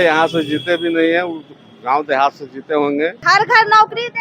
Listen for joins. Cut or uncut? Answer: cut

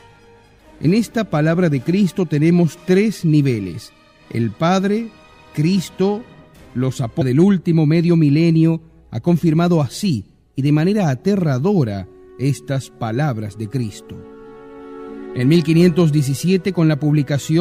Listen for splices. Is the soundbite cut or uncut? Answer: uncut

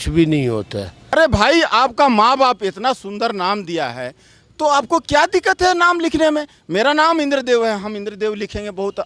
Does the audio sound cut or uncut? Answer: cut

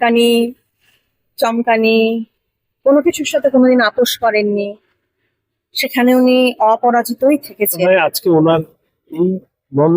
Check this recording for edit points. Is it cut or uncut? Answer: cut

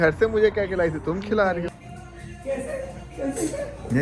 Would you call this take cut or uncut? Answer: cut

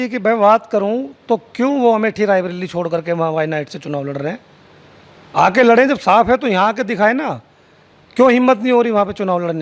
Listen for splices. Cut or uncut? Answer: uncut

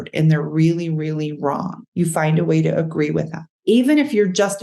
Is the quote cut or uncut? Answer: cut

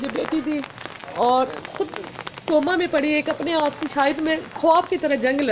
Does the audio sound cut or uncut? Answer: uncut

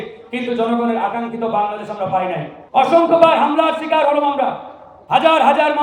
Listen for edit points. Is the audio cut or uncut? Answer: cut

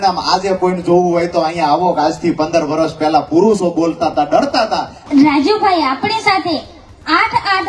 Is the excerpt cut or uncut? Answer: cut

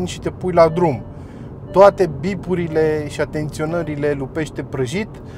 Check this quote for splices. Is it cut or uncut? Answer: uncut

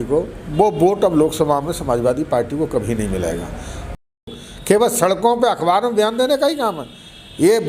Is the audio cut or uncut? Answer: cut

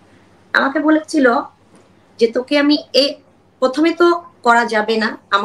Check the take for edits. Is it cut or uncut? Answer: uncut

